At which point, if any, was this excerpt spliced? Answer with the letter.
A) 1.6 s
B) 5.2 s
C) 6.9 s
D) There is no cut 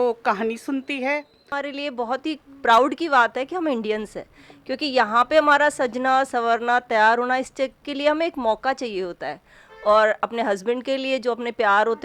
A